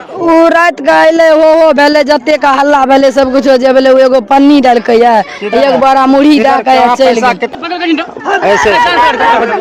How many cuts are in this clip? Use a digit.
0